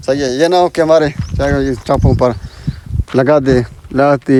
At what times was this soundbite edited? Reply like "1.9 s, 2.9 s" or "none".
none